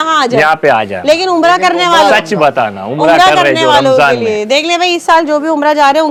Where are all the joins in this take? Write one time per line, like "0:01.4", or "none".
none